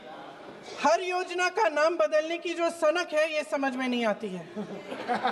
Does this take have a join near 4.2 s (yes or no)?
no